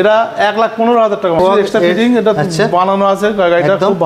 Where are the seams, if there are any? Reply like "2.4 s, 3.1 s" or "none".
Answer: 1.4 s